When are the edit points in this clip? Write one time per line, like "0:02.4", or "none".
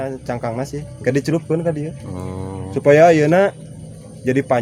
none